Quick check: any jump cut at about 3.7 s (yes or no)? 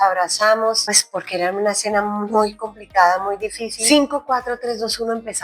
yes